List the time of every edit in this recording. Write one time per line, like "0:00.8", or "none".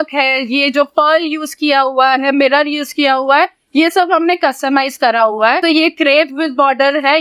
0:05.6